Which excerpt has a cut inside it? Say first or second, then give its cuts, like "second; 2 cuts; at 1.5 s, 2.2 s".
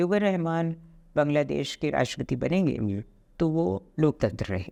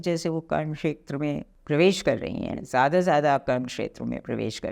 second; 1 cut; at 1.5 s